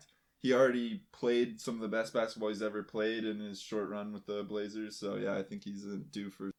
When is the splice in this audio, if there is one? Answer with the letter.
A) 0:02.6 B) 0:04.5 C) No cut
C